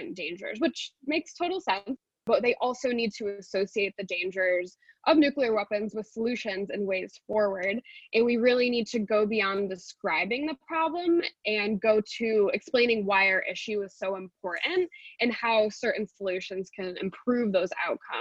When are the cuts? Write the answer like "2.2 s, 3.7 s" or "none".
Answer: none